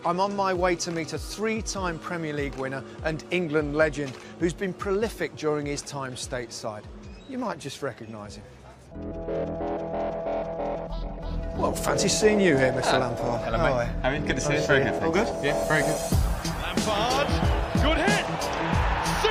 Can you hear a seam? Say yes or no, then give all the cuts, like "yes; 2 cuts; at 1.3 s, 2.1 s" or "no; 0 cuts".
no; 0 cuts